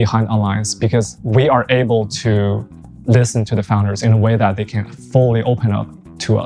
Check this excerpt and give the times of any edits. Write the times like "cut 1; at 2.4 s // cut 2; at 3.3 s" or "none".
cut 1; at 1.2 s